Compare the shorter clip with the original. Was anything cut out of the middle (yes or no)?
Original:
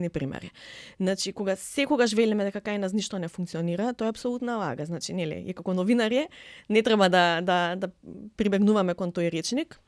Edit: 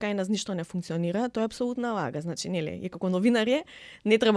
no